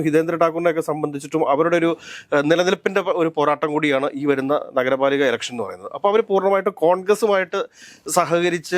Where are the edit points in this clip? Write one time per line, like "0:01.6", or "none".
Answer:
none